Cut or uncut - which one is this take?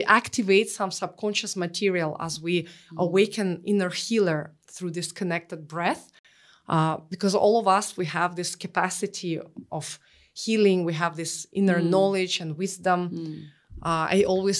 uncut